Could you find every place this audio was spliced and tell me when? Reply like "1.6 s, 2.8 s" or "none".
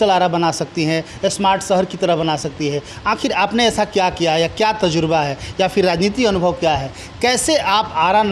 none